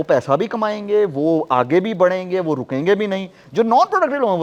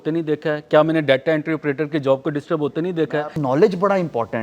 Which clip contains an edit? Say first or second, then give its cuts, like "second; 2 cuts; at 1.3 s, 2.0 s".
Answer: second; 1 cut; at 3.1 s